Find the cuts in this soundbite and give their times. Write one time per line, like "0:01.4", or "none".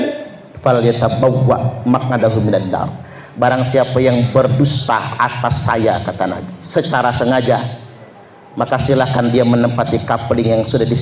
none